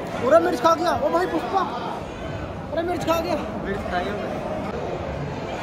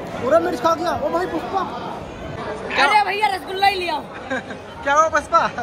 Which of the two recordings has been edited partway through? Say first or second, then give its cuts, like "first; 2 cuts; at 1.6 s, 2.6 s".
second; 1 cut; at 2.4 s